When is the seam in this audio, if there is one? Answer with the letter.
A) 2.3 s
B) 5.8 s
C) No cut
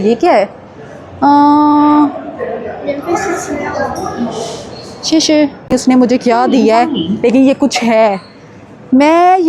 B